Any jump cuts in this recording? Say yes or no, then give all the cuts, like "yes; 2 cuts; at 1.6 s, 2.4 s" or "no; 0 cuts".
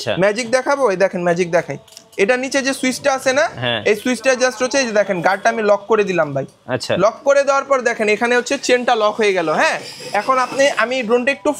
no; 0 cuts